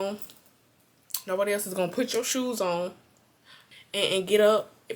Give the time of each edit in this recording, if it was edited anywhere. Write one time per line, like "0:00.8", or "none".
0:03.6